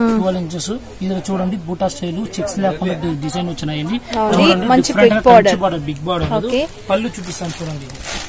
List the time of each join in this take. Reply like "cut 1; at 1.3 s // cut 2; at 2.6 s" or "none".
cut 1; at 4.4 s